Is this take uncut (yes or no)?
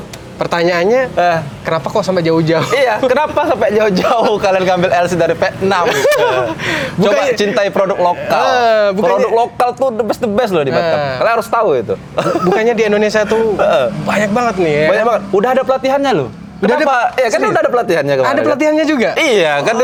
yes